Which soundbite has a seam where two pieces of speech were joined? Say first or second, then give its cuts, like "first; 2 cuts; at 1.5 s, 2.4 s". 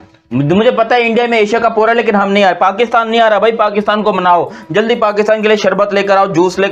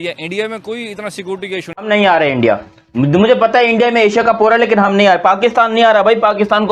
second; 1 cut; at 1.7 s